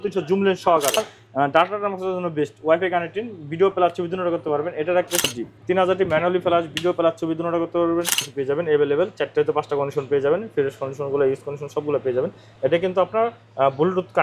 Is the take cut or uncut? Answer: cut